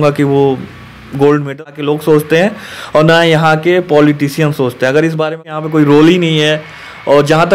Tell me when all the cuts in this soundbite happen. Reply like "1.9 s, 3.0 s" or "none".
1.6 s, 5.4 s